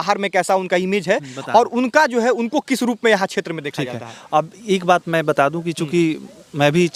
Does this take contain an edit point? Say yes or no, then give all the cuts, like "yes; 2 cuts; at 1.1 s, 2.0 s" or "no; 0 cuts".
no; 0 cuts